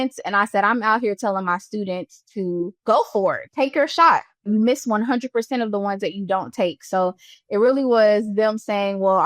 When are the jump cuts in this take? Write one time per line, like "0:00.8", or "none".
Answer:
0:04.5